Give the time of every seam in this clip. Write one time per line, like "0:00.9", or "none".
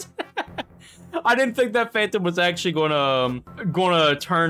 0:03.5